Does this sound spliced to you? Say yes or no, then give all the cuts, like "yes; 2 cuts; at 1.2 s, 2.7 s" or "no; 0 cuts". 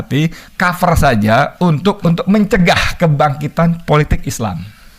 yes; 1 cut; at 2.0 s